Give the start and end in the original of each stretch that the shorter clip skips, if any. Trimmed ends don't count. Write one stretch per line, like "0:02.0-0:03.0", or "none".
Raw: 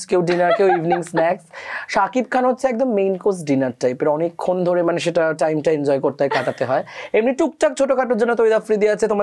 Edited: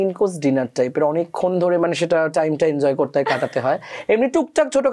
none